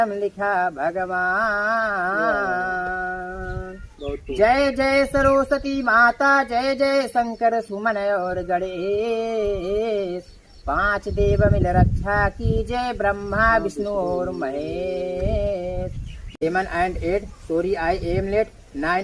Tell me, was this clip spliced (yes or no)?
yes